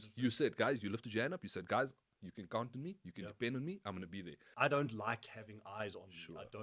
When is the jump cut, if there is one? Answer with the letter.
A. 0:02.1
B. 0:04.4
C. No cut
B